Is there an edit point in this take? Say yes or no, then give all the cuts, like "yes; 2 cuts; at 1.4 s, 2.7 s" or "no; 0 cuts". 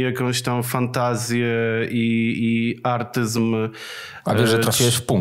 no; 0 cuts